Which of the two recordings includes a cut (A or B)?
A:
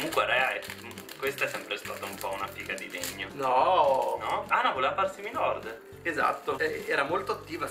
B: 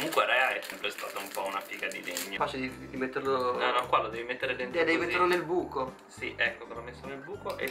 B